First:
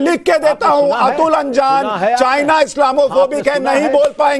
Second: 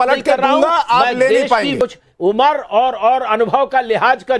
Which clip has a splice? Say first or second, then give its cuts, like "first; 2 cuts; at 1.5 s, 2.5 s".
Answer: second; 1 cut; at 1.7 s